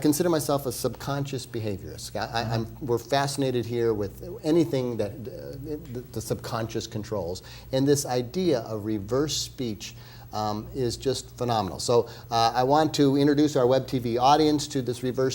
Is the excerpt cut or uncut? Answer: cut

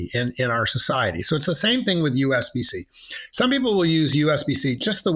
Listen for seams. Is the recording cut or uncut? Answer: uncut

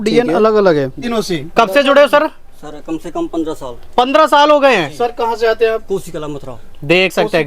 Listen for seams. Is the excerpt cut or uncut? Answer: cut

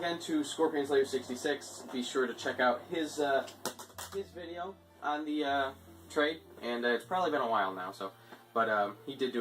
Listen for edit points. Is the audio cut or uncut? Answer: cut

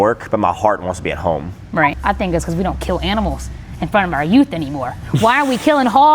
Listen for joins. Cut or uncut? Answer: cut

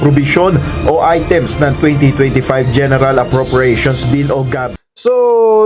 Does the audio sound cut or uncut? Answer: cut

